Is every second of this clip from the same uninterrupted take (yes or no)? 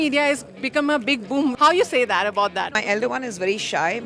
no